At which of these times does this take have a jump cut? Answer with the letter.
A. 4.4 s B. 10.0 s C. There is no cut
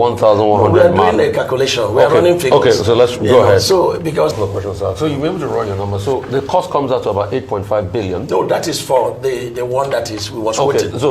A